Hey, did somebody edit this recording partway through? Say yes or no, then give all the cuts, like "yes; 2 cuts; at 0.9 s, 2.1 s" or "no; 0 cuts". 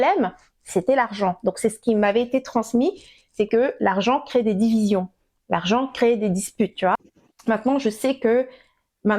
no; 0 cuts